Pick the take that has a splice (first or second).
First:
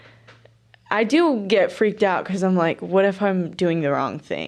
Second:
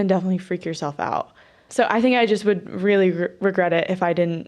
second